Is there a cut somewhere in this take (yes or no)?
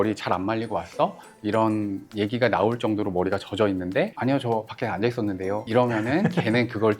yes